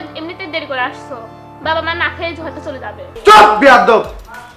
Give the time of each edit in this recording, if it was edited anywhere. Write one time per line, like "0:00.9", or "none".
0:03.0